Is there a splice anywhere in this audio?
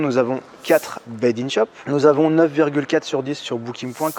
yes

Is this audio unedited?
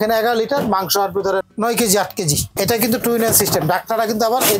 no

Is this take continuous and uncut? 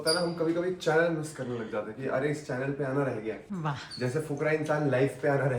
no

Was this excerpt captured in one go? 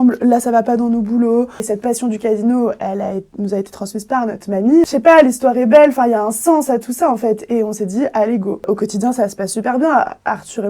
no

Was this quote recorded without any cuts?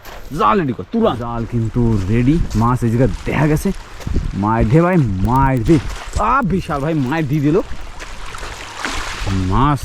no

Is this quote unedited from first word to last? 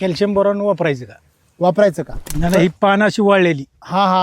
no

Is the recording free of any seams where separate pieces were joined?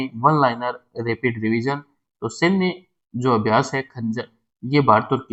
yes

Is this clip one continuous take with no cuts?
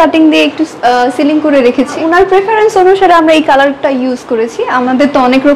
yes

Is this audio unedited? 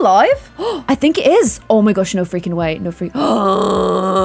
yes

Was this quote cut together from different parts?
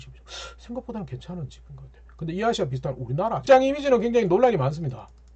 yes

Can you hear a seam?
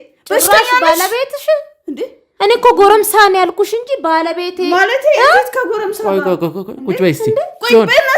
no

